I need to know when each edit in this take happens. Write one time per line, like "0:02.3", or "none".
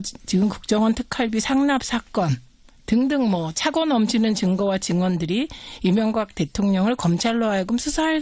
0:05.3

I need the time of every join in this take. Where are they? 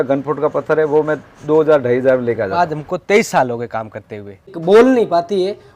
0:02.8
0:04.5

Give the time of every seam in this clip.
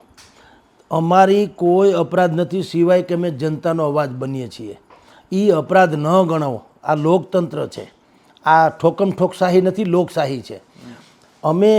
none

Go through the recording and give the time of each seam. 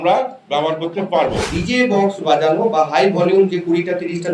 0:01.6

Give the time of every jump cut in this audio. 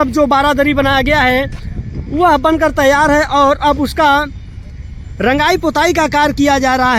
none

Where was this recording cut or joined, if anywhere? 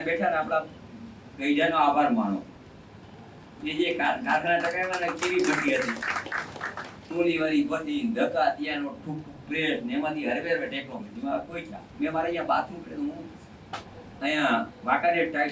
0:11.8

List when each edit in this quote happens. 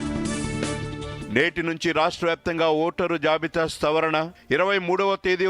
0:00.9

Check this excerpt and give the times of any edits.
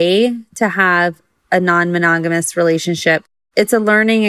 0:03.3

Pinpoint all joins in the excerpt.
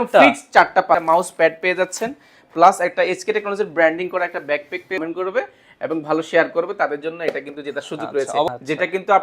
0:01.0
0:05.0
0:08.5

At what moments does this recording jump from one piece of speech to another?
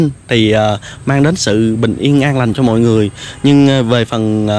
none

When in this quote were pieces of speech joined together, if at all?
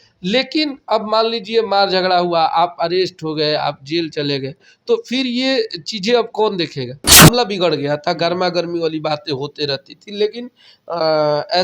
0:07.2

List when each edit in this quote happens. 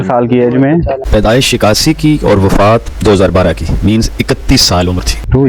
none

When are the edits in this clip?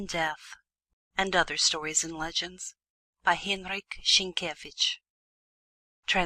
none

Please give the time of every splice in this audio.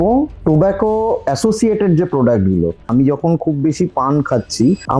0:02.9

